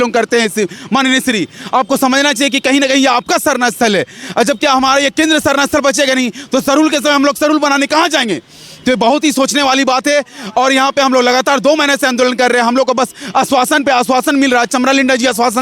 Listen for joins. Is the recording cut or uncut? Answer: uncut